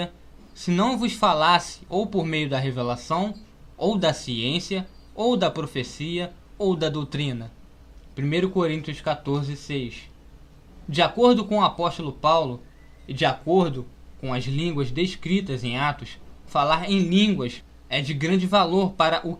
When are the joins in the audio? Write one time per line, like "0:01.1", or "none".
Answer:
none